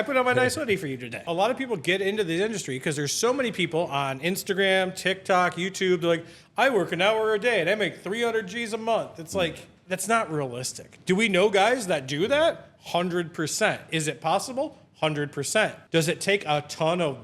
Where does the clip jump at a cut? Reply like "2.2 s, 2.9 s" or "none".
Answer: 1.3 s, 9.7 s, 15.8 s